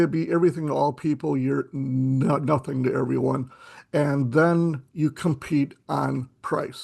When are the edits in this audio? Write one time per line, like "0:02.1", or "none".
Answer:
none